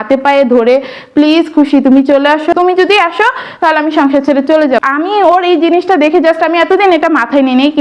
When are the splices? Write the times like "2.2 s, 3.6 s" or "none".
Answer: 2.5 s, 4.8 s